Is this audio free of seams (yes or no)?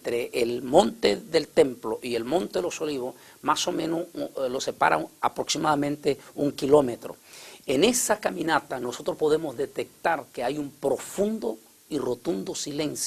no